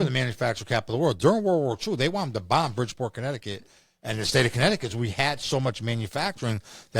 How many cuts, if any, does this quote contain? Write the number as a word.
zero